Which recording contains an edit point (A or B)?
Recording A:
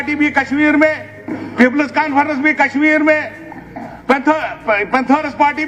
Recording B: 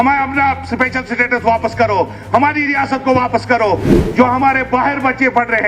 B